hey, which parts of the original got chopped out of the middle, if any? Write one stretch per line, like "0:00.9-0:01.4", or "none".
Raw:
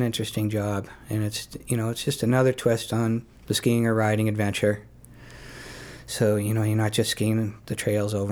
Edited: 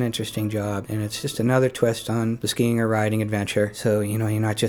0:01.1-0:02.0
0:03.3-0:03.5
0:04.8-0:06.1